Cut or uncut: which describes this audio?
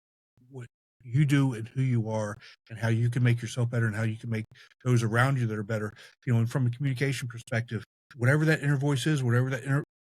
cut